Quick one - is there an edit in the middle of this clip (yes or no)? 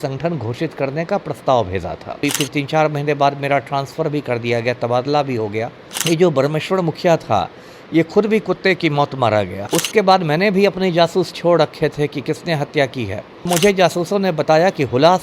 yes